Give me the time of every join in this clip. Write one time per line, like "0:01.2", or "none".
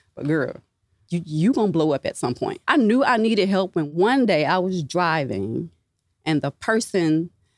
0:01.0
0:02.5
0:03.9